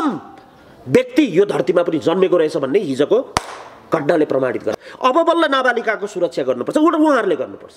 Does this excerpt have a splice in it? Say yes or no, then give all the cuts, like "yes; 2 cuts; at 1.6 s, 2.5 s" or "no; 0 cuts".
yes; 1 cut; at 4.7 s